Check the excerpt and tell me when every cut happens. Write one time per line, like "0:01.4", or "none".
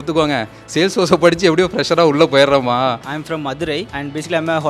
0:03.1